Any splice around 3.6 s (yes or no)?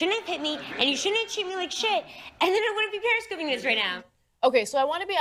no